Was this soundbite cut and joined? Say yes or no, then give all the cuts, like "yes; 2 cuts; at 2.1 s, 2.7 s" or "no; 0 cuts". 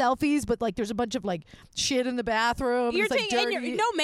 no; 0 cuts